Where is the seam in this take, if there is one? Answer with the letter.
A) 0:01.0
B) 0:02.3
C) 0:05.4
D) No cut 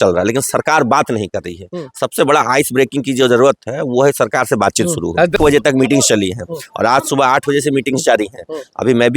C